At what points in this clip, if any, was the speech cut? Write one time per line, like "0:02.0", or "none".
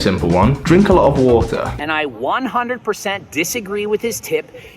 0:01.7